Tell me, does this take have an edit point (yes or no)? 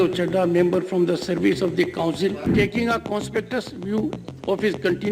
yes